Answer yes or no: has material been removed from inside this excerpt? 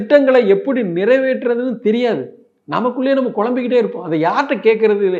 no